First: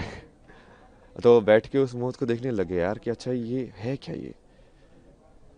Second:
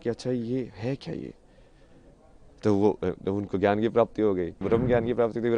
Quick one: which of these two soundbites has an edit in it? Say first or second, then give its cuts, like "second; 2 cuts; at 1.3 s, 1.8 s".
second; 1 cut; at 4.6 s